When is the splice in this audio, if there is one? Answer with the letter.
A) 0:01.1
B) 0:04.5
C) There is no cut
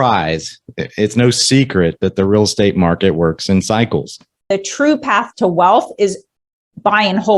B